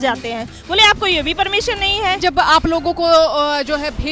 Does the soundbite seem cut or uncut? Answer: cut